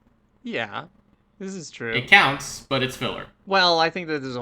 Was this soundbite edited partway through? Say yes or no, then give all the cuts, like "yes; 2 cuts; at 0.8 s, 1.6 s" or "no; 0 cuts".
yes; 1 cut; at 3.3 s